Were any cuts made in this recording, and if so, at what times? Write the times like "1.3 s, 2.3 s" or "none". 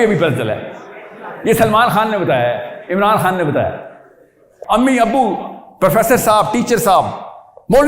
4.5 s